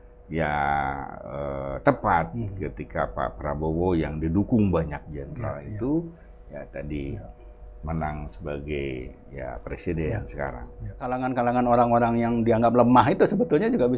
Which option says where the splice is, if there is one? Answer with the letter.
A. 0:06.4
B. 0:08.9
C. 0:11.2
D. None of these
C